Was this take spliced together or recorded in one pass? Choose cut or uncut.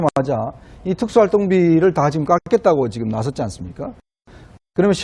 cut